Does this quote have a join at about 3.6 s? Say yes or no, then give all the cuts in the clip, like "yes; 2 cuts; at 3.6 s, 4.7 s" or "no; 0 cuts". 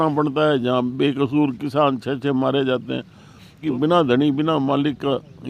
yes; 1 cut; at 3.6 s